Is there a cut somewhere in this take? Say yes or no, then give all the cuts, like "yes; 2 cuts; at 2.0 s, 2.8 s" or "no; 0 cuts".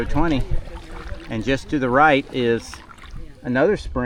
no; 0 cuts